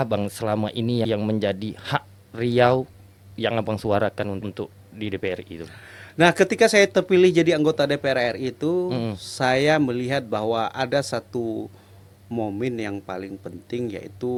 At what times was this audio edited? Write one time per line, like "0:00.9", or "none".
none